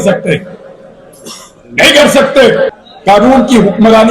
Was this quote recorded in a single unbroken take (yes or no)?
no